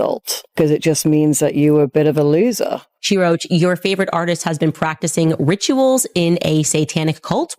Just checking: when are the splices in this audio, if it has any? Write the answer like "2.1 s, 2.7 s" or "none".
2.9 s